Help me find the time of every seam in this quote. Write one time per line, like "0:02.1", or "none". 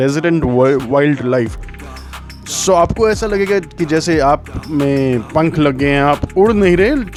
none